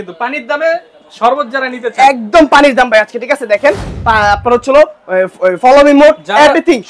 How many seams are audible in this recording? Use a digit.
1